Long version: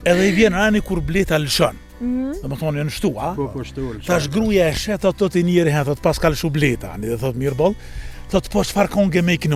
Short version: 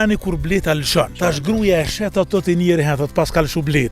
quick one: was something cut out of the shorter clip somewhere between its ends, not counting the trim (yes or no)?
yes